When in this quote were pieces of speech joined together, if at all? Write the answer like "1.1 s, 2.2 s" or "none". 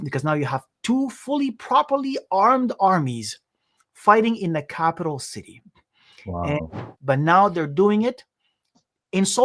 6.9 s